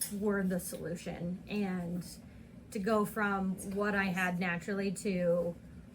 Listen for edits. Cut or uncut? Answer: uncut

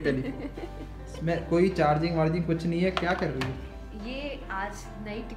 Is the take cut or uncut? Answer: uncut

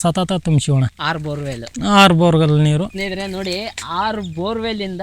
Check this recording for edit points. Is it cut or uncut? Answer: uncut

